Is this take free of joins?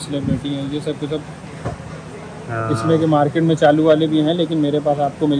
yes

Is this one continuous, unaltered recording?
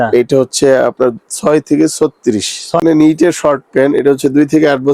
no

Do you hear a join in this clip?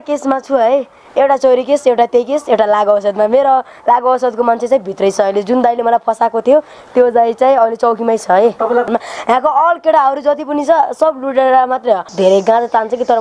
yes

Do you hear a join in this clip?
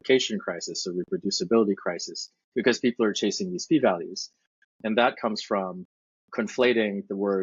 yes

